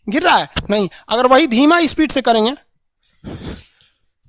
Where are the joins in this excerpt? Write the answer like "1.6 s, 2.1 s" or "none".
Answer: none